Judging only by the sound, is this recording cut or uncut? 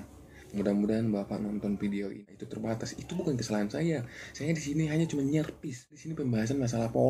cut